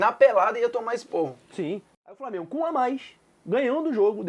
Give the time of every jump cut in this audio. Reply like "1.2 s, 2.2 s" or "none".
2.1 s